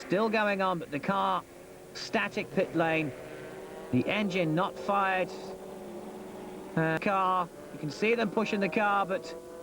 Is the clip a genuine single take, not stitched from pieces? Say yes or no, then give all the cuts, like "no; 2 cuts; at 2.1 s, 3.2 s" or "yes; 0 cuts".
no; 2 cuts; at 2.5 s, 7.0 s